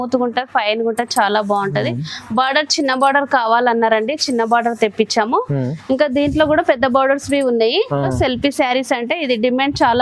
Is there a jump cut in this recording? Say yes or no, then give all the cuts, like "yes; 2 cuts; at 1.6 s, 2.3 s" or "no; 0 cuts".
yes; 1 cut; at 8.1 s